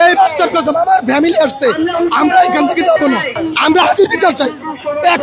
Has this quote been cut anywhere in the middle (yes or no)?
yes